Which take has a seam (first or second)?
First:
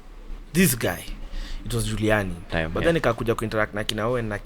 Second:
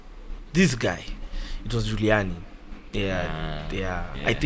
first